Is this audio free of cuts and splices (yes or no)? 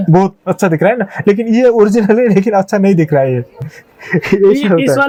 yes